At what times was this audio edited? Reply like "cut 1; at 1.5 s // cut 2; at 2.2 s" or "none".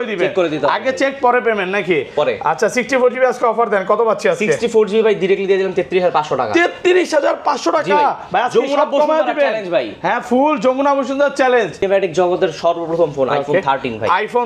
cut 1; at 11.8 s